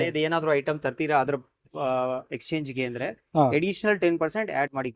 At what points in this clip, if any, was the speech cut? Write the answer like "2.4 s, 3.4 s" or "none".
none